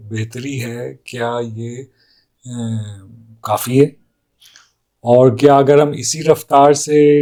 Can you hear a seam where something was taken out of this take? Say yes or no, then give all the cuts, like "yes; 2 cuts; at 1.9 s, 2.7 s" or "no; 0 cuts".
no; 0 cuts